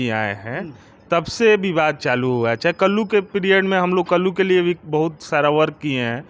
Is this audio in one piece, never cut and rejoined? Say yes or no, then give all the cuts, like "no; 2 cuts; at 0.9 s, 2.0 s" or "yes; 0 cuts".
yes; 0 cuts